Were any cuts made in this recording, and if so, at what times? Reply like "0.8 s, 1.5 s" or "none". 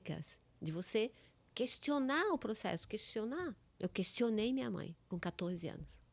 3.7 s, 5.0 s